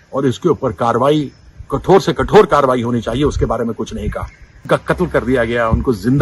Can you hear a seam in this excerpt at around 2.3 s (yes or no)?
no